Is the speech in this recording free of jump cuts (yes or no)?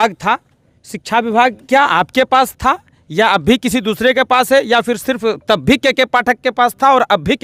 yes